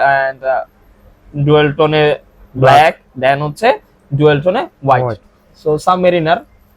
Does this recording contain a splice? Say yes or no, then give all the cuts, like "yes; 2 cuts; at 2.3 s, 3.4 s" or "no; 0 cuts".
yes; 1 cut; at 5.2 s